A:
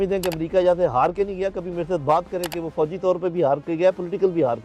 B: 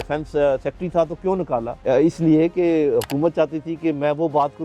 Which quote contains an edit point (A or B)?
B